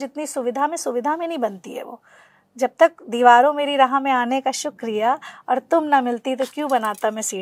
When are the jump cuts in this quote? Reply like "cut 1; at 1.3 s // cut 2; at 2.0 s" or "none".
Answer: none